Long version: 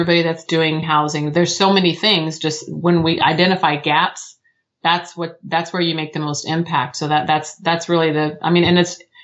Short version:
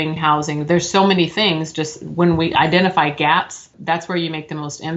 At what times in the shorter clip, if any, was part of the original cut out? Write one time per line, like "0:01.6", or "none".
0:03.7